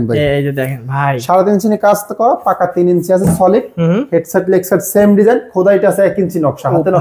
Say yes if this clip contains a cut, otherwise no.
no